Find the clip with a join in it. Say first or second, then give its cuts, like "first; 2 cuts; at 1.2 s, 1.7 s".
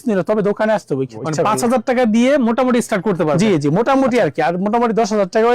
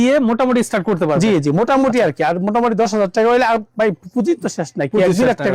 first; 1 cut; at 1.2 s